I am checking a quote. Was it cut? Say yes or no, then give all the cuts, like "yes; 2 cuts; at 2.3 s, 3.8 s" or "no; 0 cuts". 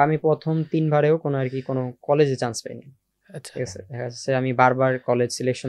no; 0 cuts